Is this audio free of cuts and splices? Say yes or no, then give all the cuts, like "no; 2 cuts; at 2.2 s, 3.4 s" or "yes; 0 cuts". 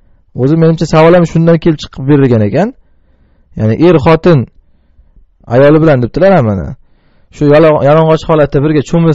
no; 1 cut; at 1.1 s